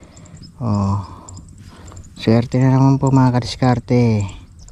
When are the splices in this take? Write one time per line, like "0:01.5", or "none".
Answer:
none